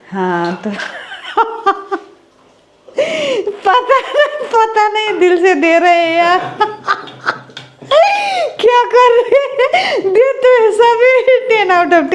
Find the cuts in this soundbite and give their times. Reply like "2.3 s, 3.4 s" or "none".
none